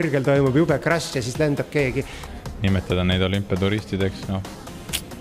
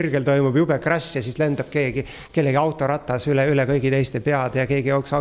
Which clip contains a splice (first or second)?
first